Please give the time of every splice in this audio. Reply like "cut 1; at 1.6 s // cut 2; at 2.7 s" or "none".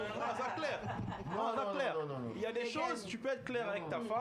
none